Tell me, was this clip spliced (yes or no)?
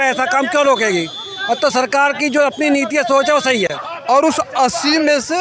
yes